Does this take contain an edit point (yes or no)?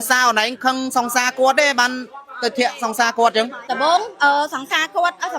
yes